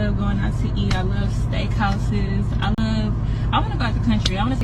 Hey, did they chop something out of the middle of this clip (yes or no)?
no